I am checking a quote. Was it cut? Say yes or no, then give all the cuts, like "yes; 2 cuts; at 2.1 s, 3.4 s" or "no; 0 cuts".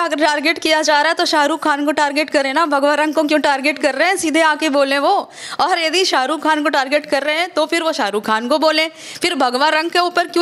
no; 0 cuts